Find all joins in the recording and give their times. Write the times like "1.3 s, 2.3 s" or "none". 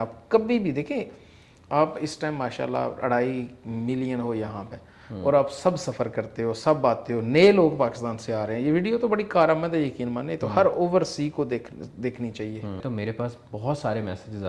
12.8 s